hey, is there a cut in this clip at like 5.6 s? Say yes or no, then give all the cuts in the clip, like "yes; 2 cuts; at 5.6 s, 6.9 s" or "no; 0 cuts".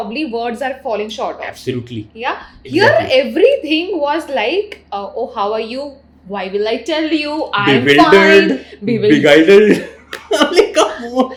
no; 0 cuts